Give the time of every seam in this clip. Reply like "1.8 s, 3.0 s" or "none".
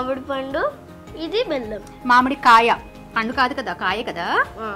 none